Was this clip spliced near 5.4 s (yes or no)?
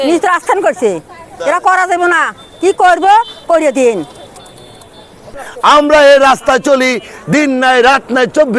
yes